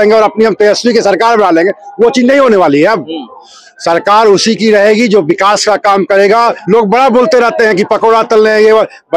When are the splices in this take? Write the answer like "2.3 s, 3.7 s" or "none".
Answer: 6.6 s